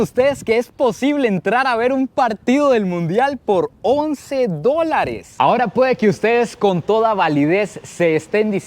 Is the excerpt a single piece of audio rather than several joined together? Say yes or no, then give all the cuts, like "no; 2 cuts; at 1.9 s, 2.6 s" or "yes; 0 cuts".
no; 1 cut; at 5.2 s